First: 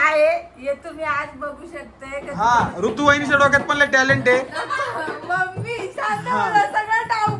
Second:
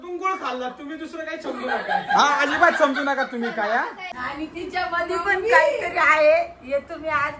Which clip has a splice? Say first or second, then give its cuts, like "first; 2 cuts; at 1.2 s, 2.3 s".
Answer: second; 1 cut; at 4.0 s